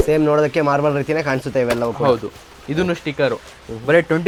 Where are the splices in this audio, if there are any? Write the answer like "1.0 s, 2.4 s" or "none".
none